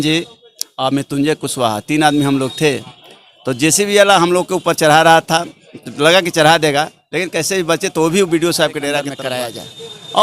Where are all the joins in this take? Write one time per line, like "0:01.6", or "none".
0:09.2